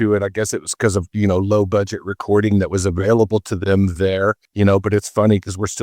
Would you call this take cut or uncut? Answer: cut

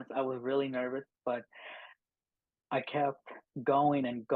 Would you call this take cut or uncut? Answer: uncut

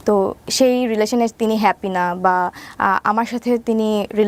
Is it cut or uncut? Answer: uncut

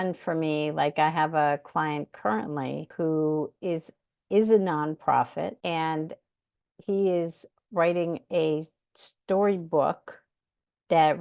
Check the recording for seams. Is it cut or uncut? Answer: cut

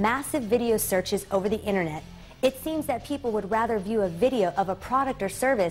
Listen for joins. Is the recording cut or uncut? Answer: uncut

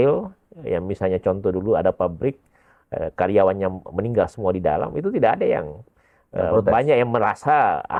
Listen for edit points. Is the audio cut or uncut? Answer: uncut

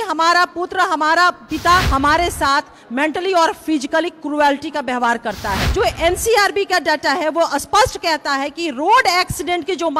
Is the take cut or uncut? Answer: cut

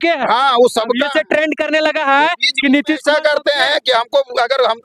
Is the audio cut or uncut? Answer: uncut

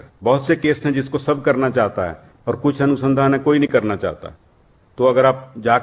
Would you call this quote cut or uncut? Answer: uncut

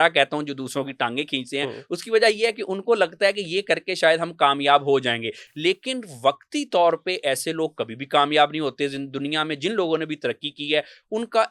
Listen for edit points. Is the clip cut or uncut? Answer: uncut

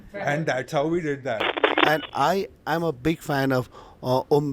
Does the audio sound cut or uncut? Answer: cut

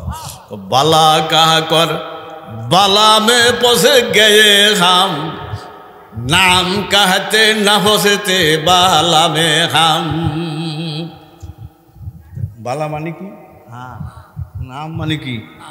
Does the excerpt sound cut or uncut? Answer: uncut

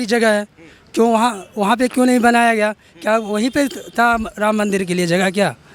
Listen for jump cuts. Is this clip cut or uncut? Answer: uncut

